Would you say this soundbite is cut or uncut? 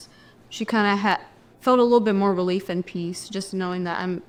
uncut